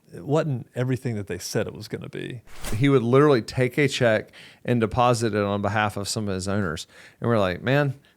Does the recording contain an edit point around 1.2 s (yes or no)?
no